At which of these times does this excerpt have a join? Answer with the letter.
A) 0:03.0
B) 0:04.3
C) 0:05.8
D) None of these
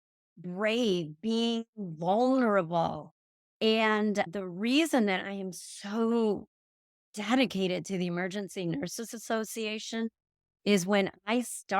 B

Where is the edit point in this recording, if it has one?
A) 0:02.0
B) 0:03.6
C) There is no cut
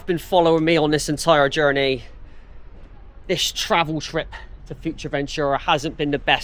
C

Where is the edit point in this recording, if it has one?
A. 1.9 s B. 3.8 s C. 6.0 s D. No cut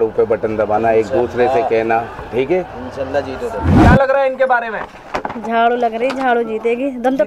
B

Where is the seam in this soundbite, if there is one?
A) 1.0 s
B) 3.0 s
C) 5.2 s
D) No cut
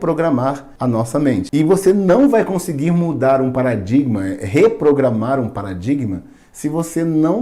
A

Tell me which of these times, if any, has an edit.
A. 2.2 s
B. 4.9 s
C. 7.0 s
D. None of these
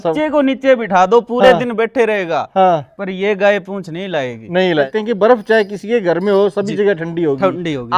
B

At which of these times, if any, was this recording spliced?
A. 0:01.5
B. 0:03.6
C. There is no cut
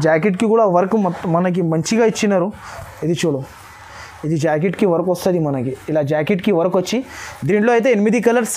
C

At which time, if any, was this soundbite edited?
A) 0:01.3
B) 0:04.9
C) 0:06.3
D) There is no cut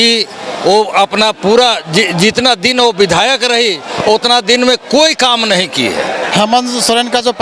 C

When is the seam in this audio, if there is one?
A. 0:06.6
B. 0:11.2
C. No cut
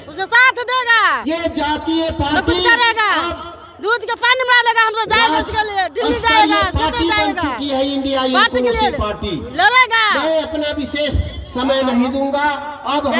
C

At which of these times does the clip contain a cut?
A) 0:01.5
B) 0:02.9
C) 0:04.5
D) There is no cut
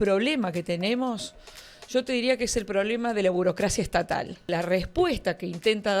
C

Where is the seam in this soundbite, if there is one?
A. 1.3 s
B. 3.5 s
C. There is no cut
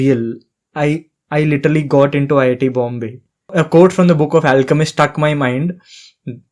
B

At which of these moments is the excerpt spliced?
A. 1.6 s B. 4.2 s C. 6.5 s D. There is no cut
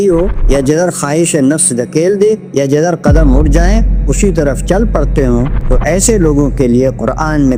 D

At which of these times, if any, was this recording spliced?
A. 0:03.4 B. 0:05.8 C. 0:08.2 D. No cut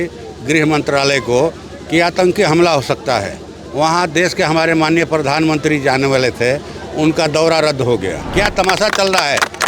C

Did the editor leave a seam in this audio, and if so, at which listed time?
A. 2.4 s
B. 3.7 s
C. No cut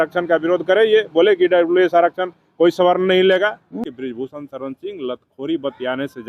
B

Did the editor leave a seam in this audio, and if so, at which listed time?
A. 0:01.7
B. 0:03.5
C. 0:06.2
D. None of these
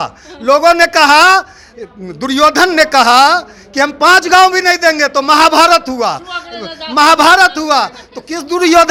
D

